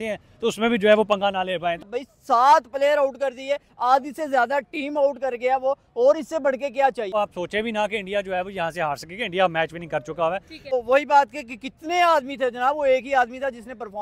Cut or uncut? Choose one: cut